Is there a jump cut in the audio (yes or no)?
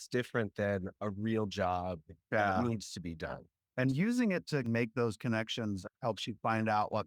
no